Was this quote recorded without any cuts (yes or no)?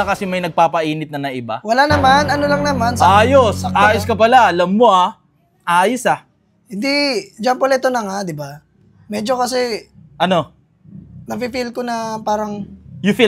yes